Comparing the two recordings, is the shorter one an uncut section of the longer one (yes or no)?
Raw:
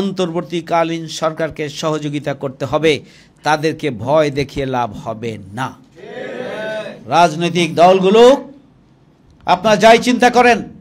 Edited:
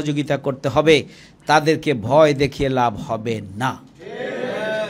yes